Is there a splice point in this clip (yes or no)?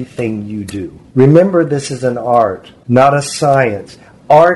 yes